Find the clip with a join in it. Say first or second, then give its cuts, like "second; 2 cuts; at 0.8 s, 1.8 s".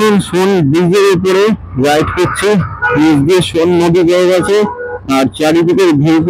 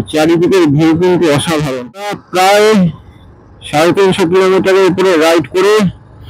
second; 1 cut; at 2.1 s